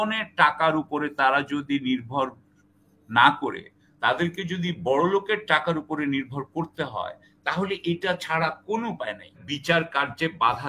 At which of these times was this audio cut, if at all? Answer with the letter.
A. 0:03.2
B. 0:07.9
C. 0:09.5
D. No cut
C